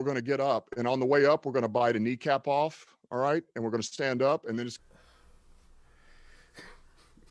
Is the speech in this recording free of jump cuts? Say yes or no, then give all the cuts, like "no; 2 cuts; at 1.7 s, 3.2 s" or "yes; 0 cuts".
no; 1 cut; at 4.8 s